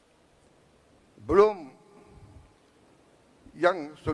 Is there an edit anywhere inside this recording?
no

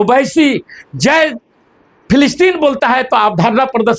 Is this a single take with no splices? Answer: yes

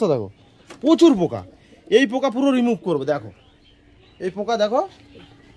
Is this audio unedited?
yes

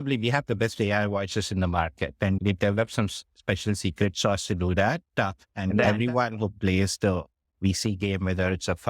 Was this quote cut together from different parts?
yes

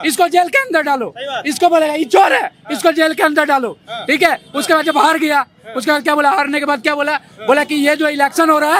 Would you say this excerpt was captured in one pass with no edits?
yes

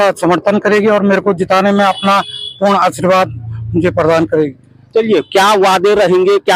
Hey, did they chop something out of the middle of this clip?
no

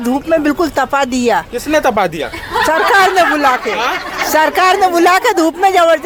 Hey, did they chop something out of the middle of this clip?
no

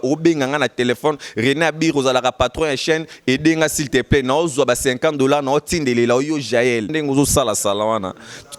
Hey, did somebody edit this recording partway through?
yes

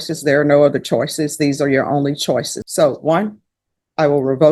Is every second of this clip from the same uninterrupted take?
no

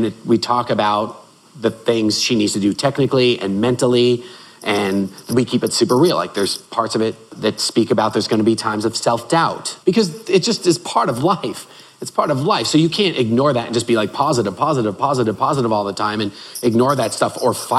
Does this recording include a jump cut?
yes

